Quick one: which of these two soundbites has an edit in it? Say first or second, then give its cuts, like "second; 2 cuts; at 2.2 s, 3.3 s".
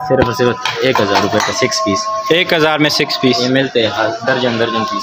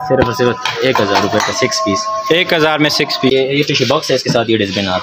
second; 1 cut; at 3.3 s